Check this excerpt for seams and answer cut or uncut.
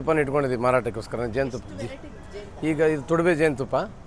uncut